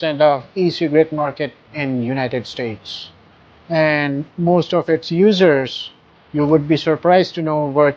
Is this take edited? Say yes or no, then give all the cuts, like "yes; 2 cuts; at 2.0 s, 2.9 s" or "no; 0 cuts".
no; 0 cuts